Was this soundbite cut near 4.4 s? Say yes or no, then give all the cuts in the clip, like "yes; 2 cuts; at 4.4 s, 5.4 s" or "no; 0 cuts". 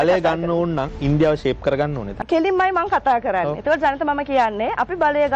no; 2 cuts; at 0.9 s, 2.1 s